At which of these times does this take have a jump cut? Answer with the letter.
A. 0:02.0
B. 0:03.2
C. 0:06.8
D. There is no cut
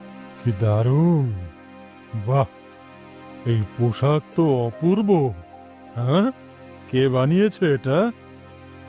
D